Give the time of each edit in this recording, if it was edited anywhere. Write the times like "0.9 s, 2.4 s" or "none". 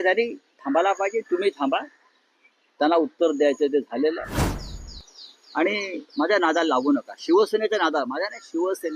4.6 s

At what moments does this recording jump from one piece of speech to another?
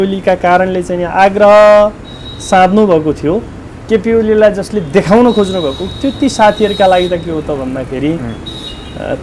none

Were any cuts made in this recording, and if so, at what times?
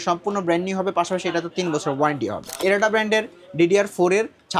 2.6 s

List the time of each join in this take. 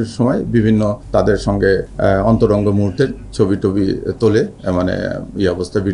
1.0 s, 1.9 s

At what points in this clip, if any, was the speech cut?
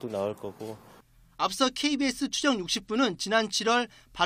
2.9 s

